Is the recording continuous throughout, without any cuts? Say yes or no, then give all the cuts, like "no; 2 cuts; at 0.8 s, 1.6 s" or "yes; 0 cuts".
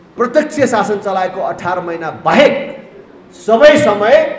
yes; 0 cuts